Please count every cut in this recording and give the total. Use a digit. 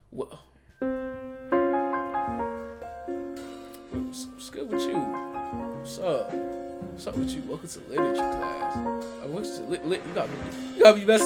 0